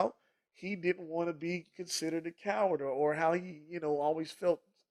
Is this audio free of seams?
yes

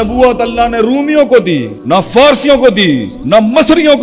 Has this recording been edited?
yes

